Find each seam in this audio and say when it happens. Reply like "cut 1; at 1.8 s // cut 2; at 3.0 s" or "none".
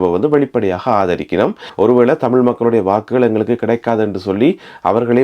cut 1; at 1.6 s